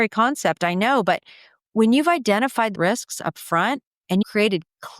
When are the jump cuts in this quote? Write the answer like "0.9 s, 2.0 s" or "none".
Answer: 2.7 s, 4.2 s